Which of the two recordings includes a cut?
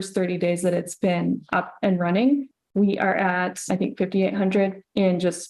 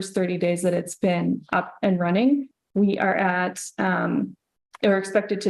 first; 1 cut; at 3.6 s

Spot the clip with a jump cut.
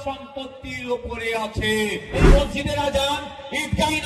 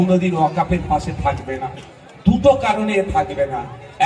first; 1 cut; at 2.2 s

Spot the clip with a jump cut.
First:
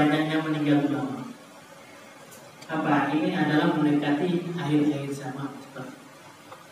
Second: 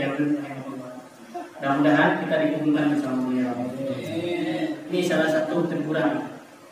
second; 1 cut; at 4.9 s

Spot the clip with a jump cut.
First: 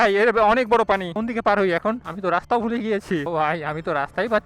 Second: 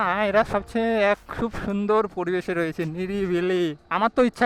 first; 3 cuts; at 1.1 s, 2.1 s, 3.3 s

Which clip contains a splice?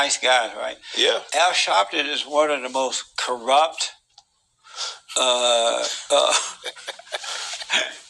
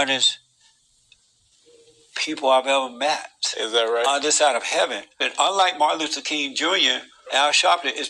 second; 1 cut; at 5.2 s

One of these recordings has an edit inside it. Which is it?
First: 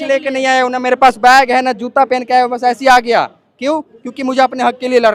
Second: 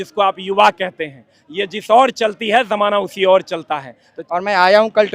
second; 1 cut; at 4.2 s

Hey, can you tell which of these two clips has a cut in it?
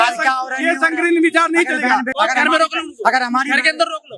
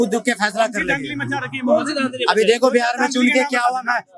first; 1 cut; at 2.1 s

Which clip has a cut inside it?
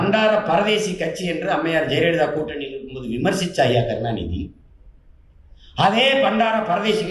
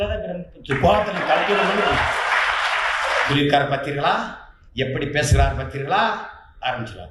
second; 1 cut; at 3.3 s

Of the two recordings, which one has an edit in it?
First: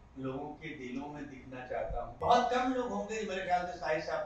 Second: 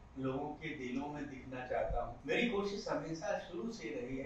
first; 1 cut; at 2.1 s

